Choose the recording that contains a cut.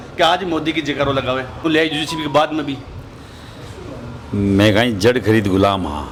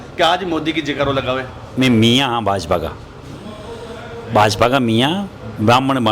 second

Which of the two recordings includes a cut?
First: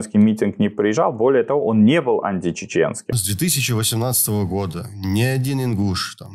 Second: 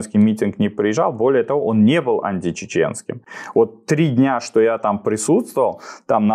first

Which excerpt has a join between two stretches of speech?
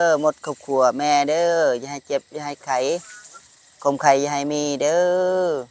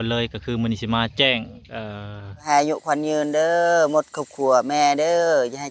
second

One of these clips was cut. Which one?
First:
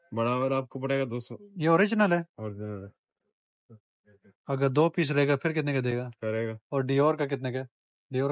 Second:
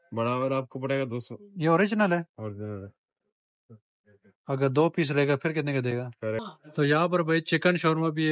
second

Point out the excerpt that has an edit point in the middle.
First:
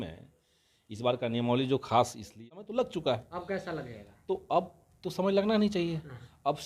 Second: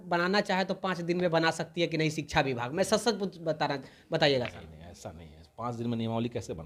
first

